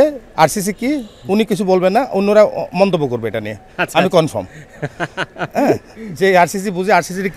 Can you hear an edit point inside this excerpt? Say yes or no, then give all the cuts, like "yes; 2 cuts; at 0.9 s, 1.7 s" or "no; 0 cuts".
no; 0 cuts